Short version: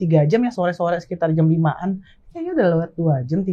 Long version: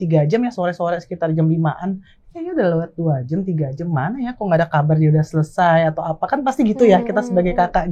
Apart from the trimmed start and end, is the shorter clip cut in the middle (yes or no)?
no